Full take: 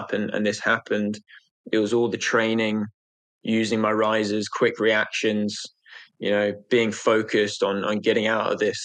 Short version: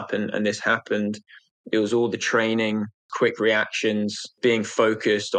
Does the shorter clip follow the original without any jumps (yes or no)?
no